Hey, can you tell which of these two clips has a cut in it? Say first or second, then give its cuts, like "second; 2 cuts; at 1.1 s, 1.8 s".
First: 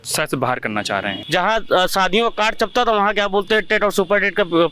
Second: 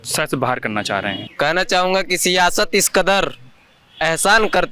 first; 1 cut; at 1.2 s